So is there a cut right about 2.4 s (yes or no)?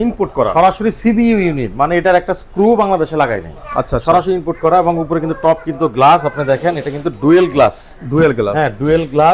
no